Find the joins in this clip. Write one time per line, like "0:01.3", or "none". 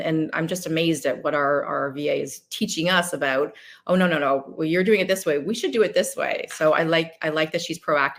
none